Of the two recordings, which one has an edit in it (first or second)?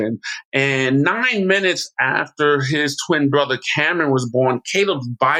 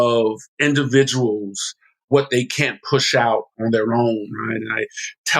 second